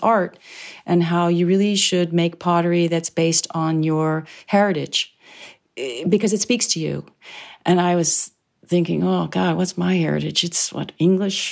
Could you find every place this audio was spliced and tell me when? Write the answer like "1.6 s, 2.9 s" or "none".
none